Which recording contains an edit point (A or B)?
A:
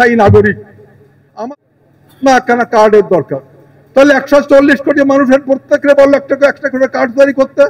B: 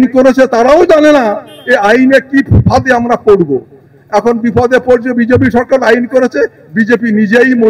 A